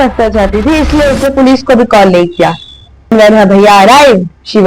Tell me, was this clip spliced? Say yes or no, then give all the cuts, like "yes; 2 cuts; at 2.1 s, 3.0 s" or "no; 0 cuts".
yes; 1 cut; at 3.1 s